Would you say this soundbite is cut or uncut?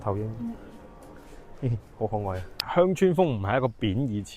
cut